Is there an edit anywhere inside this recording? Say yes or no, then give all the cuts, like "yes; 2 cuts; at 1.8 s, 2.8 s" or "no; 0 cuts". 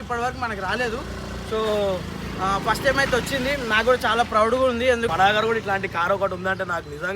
yes; 1 cut; at 5.1 s